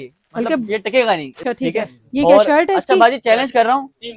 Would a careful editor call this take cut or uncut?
cut